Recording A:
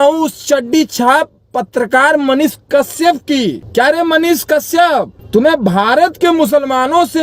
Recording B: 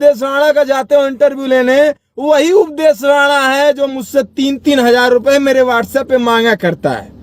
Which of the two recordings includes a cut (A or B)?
A